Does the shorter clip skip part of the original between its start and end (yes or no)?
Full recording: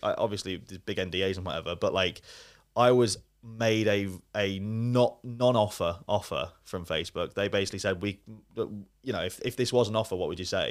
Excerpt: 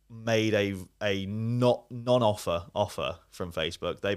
no